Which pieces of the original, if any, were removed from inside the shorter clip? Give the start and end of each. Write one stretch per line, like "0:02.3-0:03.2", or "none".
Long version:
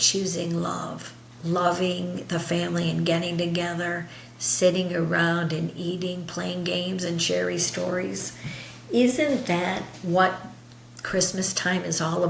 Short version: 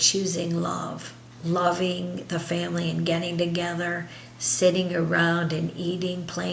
none